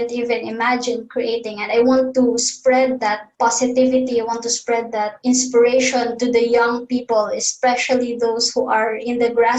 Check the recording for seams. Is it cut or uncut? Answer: cut